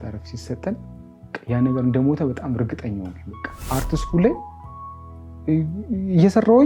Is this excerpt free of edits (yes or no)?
no